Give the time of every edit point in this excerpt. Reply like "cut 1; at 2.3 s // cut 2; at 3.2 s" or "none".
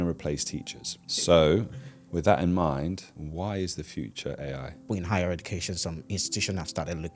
cut 1; at 1.3 s // cut 2; at 3.2 s // cut 3; at 4.9 s